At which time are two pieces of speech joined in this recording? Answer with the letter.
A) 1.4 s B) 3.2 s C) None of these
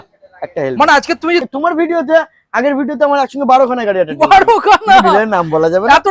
A